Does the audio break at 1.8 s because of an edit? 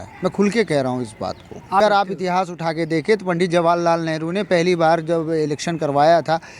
yes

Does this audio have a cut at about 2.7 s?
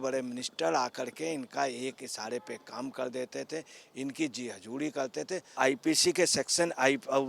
no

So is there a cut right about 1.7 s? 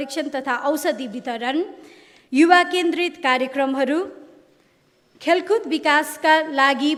no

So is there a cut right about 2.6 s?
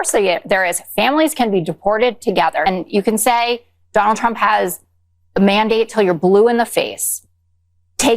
yes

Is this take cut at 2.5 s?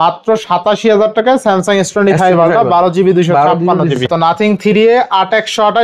no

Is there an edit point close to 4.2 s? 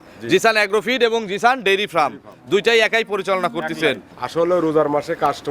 yes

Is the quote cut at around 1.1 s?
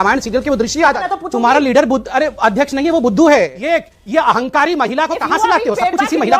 yes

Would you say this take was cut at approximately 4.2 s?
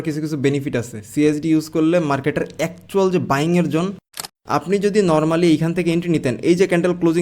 yes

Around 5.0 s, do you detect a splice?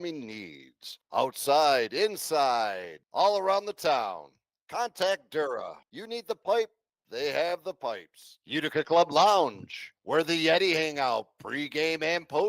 yes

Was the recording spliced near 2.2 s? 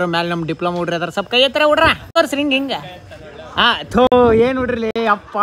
yes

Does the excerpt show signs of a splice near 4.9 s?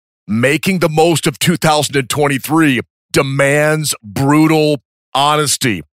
no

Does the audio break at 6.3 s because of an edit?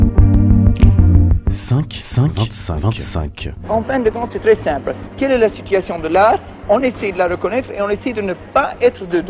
no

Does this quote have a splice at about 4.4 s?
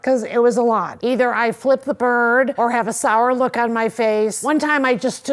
yes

